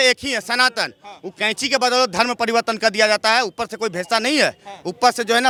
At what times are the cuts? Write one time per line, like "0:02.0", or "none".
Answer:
none

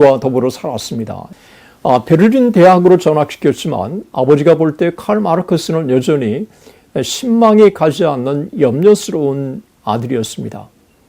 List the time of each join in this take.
0:01.2

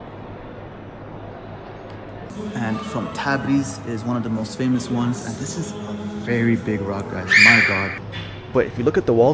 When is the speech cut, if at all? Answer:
0:02.3
0:07.9

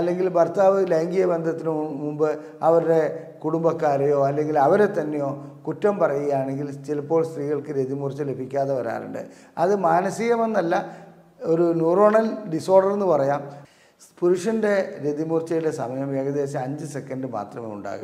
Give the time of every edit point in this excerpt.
0:13.5

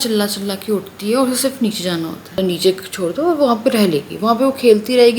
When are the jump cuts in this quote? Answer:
0:02.4

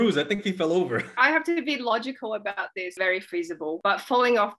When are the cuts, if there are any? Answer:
0:01.1
0:03.0

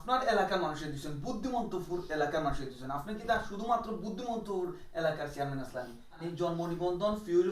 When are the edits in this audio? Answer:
0:06.2

